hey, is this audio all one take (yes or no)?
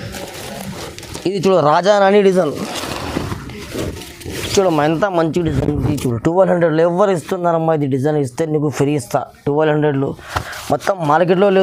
yes